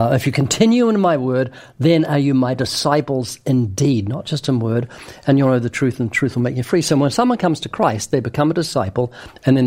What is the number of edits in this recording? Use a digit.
0